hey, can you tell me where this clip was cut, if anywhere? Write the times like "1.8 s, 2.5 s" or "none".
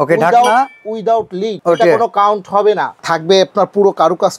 1.5 s, 2.9 s